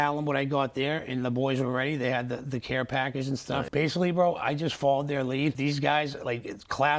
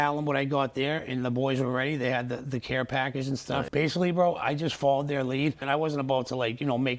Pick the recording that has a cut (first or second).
first